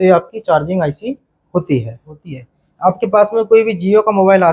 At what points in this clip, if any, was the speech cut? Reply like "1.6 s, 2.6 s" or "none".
2.1 s

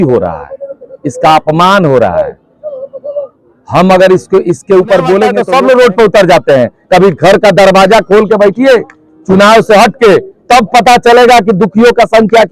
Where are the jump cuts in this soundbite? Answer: 5.4 s

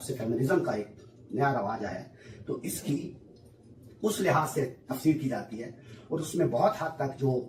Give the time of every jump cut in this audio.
none

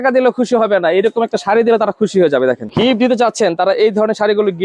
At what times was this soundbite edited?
2.7 s

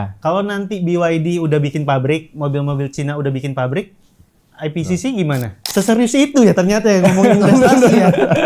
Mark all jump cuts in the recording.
5.6 s

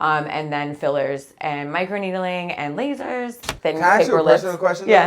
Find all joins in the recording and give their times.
3.5 s

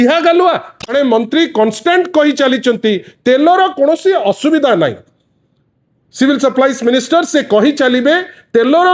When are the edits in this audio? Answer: 0.9 s

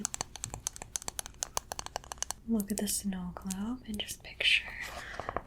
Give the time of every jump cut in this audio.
2.4 s

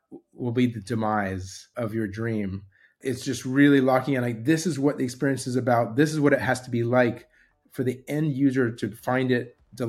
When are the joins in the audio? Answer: 1.7 s, 3.0 s

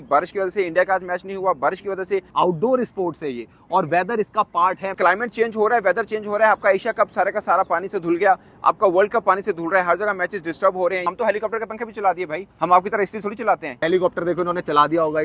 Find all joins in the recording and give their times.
2.3 s, 5.0 s, 11.0 s, 12.4 s, 13.8 s

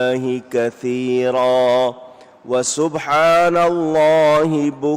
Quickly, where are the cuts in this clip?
1.8 s

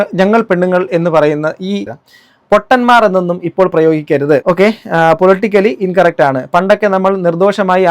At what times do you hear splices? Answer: 2.0 s

